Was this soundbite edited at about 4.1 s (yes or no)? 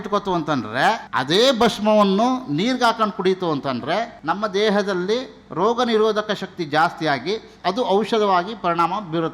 yes